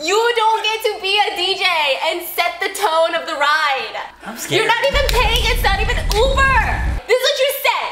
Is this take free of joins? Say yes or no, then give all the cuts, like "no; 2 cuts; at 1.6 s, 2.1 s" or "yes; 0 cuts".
yes; 0 cuts